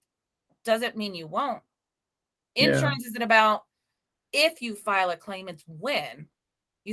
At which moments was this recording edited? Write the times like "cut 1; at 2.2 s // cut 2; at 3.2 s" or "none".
none